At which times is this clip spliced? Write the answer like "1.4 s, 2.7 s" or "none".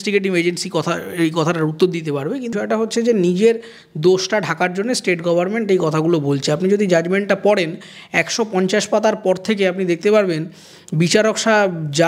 2.5 s